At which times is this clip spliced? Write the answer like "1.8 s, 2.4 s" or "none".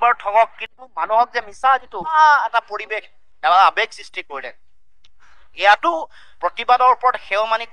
2.1 s